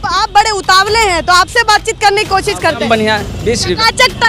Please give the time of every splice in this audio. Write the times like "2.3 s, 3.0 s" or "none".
2.8 s